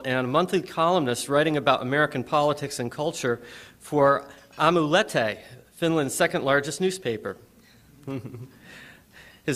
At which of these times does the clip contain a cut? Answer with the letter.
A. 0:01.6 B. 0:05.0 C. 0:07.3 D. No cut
A